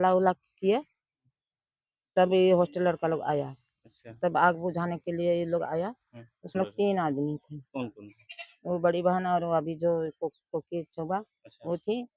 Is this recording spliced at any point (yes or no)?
yes